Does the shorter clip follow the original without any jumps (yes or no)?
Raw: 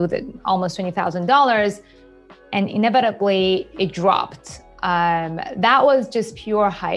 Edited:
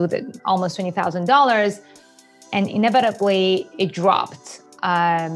yes